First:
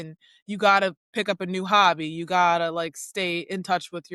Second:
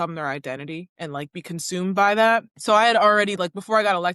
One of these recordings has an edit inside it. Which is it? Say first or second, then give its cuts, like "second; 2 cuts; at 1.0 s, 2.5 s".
second; 2 cuts; at 0.9 s, 2.5 s